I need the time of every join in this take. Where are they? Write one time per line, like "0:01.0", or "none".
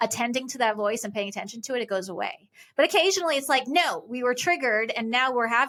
none